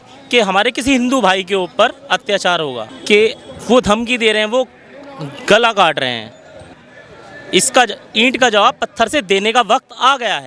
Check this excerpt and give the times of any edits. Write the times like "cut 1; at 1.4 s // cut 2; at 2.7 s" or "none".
cut 1; at 2.9 s // cut 2; at 6.7 s